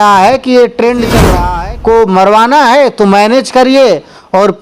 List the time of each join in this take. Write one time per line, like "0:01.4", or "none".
0:01.3